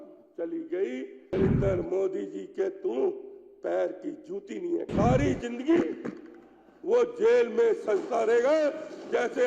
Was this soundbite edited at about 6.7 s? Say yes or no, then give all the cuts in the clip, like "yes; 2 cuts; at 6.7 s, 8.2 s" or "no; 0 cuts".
no; 2 cuts; at 1.3 s, 4.9 s